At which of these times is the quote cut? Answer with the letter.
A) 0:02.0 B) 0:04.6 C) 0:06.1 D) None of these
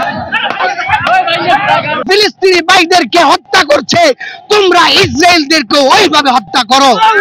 A